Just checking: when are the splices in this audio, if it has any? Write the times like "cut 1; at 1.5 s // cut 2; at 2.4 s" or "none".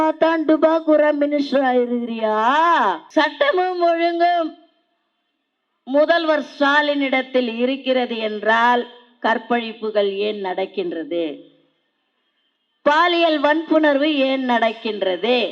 cut 1; at 3.0 s